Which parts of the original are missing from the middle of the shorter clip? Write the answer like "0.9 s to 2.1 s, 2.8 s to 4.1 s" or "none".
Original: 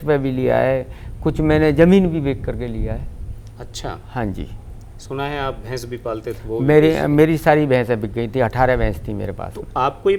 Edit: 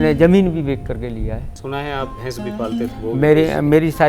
3.1 s to 5.0 s